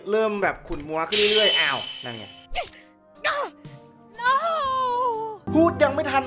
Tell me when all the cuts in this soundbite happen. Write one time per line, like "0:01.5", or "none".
0:05.4

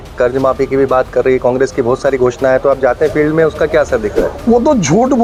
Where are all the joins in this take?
none

